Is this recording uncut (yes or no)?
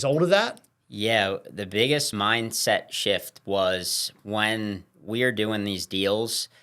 no